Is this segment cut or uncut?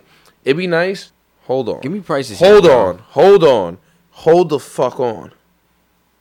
cut